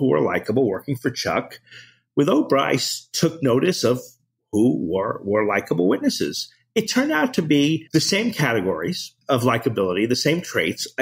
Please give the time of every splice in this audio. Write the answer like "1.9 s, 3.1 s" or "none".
7.8 s, 9.1 s